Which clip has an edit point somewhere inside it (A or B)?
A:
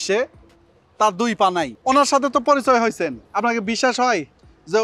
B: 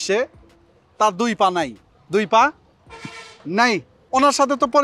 A